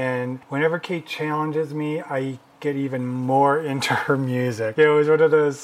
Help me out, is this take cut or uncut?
cut